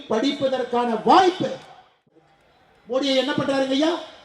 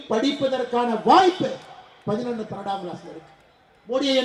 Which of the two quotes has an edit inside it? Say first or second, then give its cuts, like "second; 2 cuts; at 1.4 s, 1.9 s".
first; 1 cut; at 2.0 s